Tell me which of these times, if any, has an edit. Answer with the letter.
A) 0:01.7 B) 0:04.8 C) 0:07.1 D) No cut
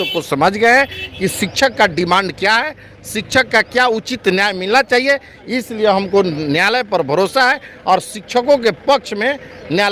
D